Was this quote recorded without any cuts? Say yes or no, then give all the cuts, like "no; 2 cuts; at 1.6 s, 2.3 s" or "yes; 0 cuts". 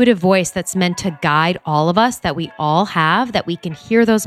yes; 0 cuts